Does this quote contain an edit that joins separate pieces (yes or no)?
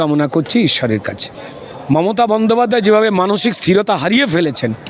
no